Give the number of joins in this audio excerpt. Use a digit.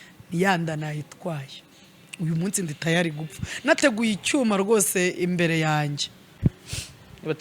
1